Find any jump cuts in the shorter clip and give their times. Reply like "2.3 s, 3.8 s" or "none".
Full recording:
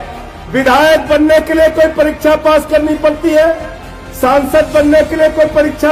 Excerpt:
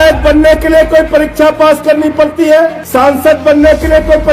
2.8 s